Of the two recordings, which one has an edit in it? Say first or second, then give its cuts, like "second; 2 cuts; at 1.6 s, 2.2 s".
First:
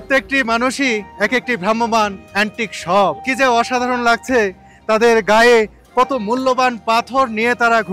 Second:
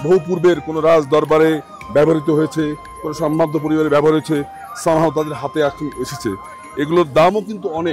first; 3 cuts; at 1.1 s, 2.2 s, 3.2 s